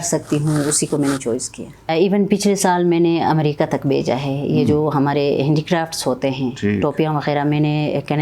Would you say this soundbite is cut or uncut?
cut